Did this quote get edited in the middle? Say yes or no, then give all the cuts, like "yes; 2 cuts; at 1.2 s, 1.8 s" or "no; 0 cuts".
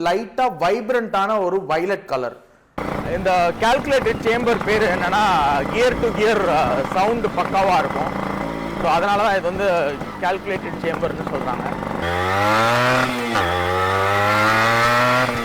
yes; 2 cuts; at 2.8 s, 12.0 s